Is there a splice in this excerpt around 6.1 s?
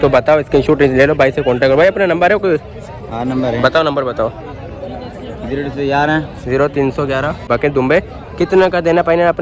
no; 1 cut; at 7.4 s

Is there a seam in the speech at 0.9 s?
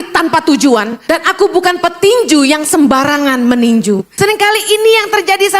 yes; 2 cuts; at 0.9 s, 4.1 s

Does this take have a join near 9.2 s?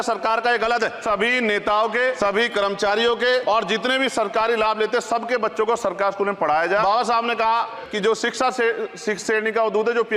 no; 5 cuts; at 1.0 s, 2.2 s, 3.4 s, 6.8 s, 7.8 s

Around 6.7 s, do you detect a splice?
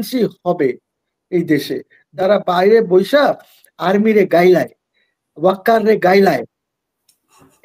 no; 1 cut; at 2.2 s

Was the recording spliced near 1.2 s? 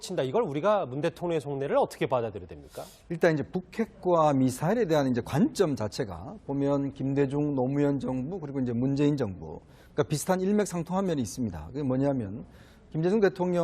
no; 1 cut; at 9.0 s

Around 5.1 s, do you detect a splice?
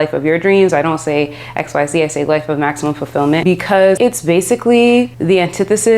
yes; 2 cuts; at 3.9 s, 5.1 s

